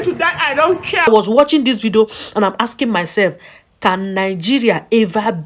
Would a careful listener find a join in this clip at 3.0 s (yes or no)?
no